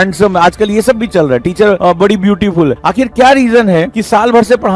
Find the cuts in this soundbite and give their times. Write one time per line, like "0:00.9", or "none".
0:01.8
0:02.8